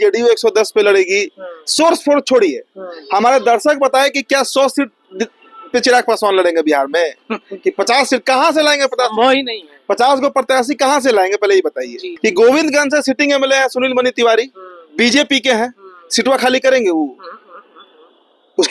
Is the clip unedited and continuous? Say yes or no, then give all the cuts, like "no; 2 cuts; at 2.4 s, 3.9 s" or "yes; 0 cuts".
no; 1 cut; at 12.0 s